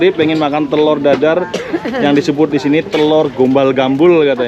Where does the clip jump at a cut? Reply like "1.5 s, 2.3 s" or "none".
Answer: none